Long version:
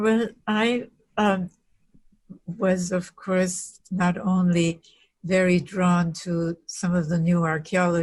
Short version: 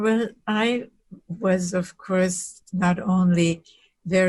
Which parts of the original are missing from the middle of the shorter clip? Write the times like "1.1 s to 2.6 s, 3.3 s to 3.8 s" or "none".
1.0 s to 2.2 s